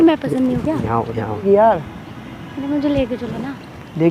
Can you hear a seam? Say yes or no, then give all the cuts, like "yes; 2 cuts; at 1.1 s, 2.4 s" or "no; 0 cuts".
yes; 1 cut; at 1.4 s